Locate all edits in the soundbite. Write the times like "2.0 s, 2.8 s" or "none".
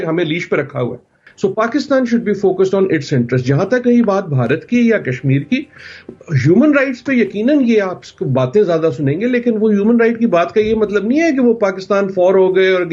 1.2 s